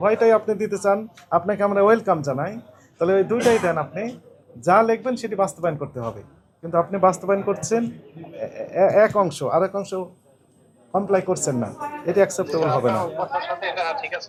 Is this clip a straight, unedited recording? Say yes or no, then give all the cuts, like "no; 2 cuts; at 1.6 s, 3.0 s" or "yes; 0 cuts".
yes; 0 cuts